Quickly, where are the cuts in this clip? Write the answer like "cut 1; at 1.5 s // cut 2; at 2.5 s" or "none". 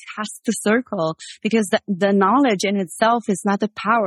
none